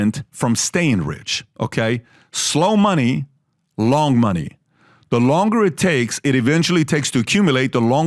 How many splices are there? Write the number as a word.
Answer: zero